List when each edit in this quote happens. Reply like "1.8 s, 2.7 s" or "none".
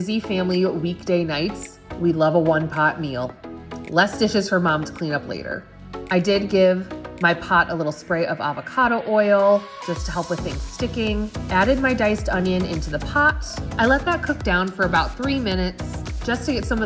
none